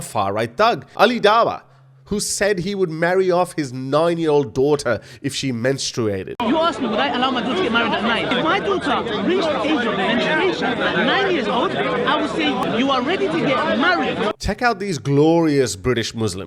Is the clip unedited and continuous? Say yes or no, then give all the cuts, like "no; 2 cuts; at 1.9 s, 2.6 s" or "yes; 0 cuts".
no; 3 cuts; at 0.9 s, 12.6 s, 14.4 s